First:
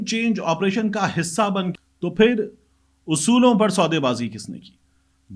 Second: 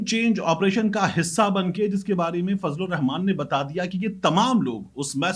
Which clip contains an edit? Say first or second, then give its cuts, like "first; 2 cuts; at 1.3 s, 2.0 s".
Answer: first; 1 cut; at 1.7 s